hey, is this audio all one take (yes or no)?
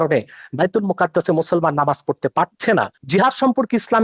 no